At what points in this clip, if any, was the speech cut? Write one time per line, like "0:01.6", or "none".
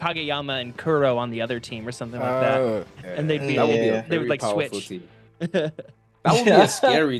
none